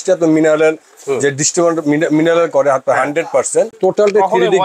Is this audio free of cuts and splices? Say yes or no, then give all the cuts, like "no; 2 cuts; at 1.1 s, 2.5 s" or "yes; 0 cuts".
no; 1 cut; at 3.7 s